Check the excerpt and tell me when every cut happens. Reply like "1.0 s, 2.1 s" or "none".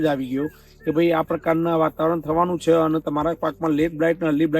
3.0 s